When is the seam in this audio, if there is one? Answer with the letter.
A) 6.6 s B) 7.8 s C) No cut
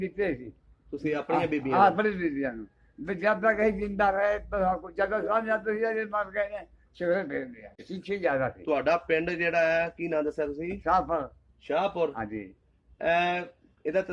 B